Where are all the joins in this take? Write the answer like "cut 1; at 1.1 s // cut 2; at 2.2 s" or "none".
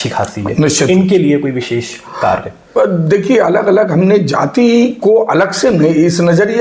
none